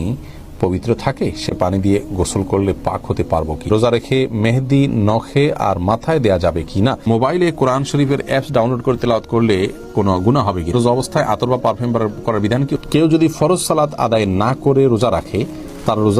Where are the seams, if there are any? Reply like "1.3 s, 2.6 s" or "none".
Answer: 3.7 s, 7.1 s, 10.7 s, 12.8 s